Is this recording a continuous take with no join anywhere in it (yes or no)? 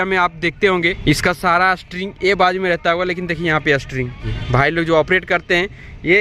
no